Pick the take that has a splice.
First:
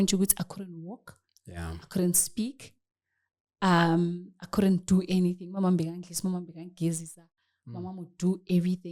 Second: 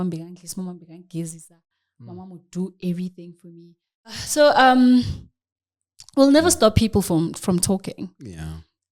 second; 1 cut; at 4.2 s

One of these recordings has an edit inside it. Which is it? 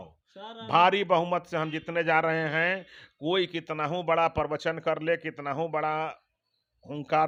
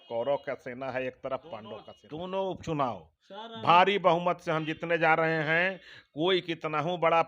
second; 1 cut; at 2.0 s

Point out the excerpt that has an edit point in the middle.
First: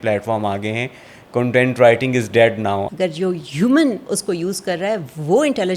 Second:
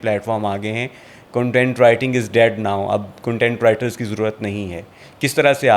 first; 1 cut; at 2.8 s

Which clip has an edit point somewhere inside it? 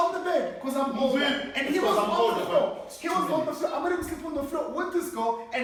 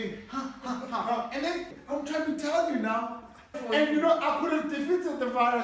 second; 2 cuts; at 1.7 s, 3.6 s

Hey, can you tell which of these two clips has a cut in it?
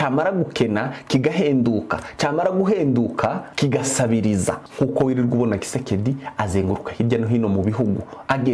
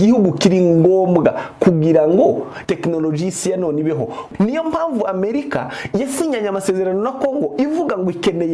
second; 2 cuts; at 2.5 s, 4.2 s

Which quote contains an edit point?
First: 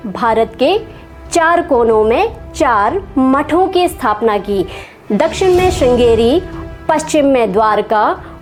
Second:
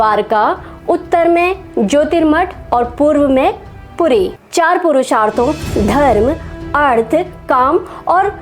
second; 1 cut; at 4.4 s

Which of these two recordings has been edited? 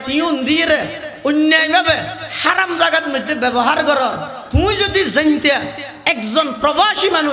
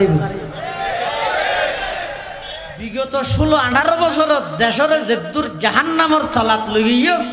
second; 1 cut; at 2.8 s

